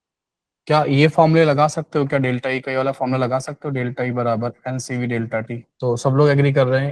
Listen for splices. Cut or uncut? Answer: cut